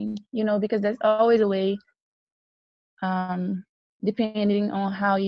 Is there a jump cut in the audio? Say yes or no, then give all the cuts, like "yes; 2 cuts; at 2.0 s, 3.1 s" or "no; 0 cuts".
no; 0 cuts